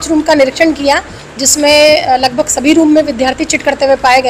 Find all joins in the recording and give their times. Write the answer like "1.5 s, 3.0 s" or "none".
none